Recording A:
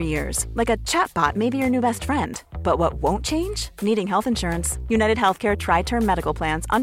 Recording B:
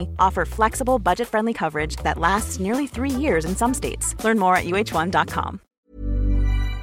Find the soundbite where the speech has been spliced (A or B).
B